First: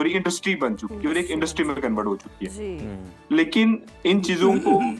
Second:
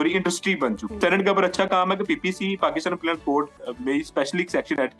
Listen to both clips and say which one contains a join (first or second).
second